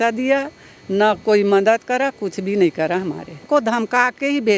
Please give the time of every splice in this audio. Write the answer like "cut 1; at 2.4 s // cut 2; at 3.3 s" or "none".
cut 1; at 3.4 s